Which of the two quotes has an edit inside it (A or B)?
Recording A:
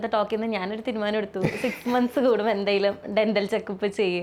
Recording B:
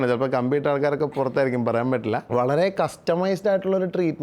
B